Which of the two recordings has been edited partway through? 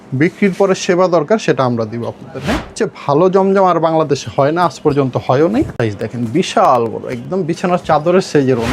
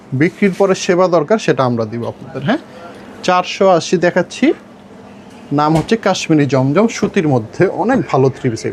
first; 2 cuts; at 2.8 s, 5.8 s

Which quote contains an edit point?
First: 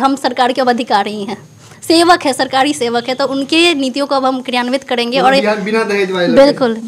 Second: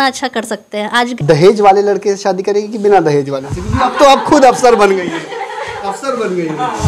second; 1 cut; at 1.1 s

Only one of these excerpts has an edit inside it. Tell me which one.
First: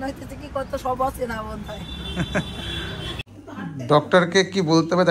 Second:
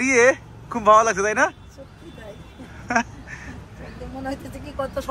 first; 1 cut; at 3.2 s

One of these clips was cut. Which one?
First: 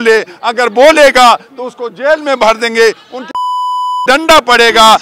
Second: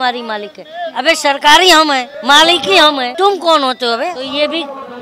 second; 3 cuts; at 2.1 s, 3.1 s, 4.2 s

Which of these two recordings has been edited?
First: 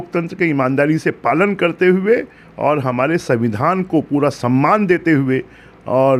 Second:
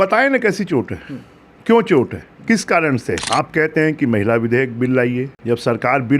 second; 2 cuts; at 3.2 s, 5.3 s

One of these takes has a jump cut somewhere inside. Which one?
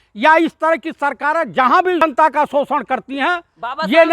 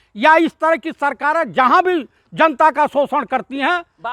first; 1 cut; at 2.0 s

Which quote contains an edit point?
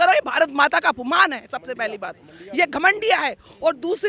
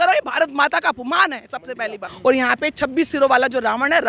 second; 1 cut; at 2.1 s

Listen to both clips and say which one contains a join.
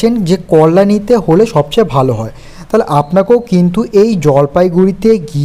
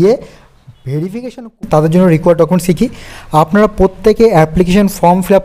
second; 1 cut; at 1.6 s

